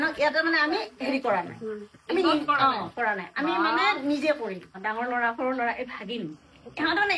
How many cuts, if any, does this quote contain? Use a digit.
1